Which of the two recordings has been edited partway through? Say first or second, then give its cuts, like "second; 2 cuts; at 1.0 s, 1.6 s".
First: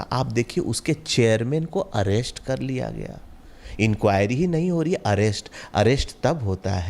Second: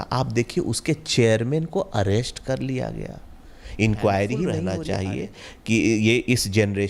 second; 1 cut; at 4.6 s